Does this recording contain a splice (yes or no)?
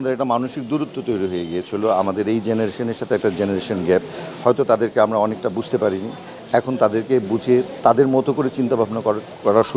no